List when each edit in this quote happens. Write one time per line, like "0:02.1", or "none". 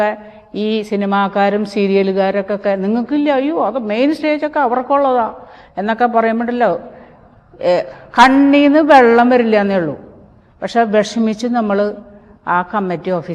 none